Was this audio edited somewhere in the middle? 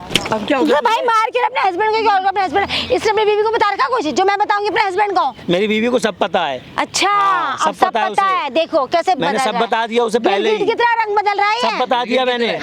no; 0 cuts

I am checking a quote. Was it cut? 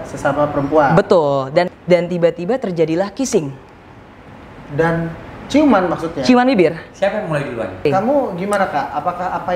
yes; 2 cuts; at 1.7 s, 7.9 s

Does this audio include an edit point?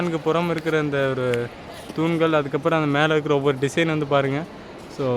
no; 0 cuts

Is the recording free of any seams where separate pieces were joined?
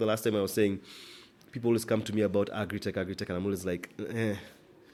yes; 0 cuts

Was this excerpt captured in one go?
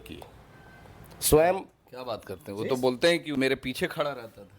no; 1 cut; at 3.4 s

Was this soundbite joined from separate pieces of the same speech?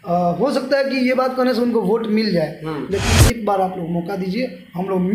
yes; 1 cut; at 3.1 s

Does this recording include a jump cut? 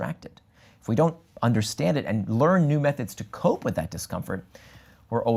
no; 0 cuts

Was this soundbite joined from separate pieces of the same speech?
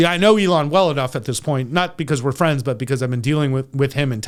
no; 0 cuts

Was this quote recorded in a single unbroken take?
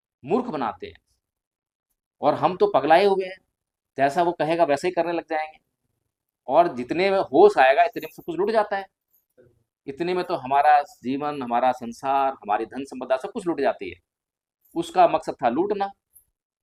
yes; 0 cuts

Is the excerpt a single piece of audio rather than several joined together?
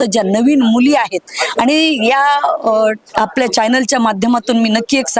yes; 0 cuts

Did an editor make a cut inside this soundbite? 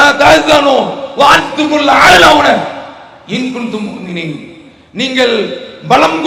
no; 0 cuts

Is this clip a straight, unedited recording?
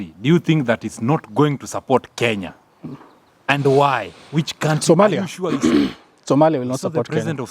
yes; 0 cuts

